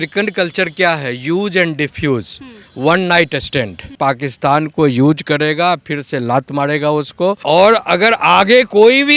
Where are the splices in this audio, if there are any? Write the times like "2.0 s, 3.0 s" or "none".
3.9 s, 7.4 s